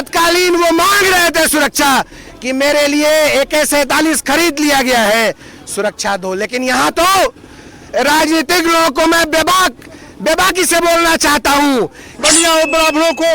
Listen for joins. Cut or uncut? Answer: cut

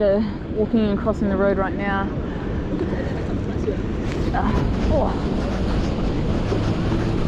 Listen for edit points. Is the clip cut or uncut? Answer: uncut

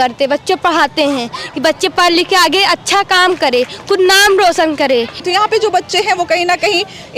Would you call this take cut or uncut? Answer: uncut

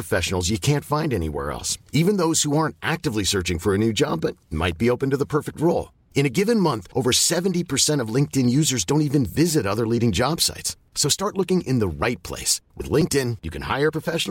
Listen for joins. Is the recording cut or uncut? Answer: uncut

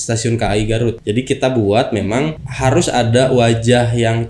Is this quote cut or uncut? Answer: cut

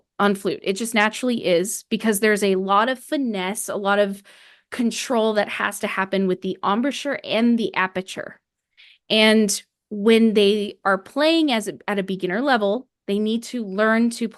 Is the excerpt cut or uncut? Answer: uncut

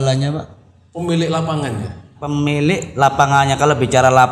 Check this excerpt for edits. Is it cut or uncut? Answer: cut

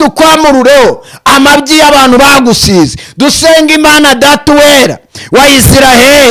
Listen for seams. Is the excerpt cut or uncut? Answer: uncut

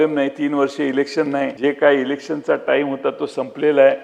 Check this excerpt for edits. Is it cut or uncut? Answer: cut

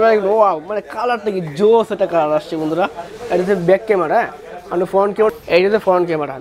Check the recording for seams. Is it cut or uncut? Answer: uncut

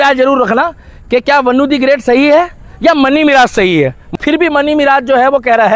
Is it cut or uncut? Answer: cut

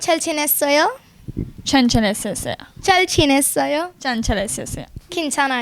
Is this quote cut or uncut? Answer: uncut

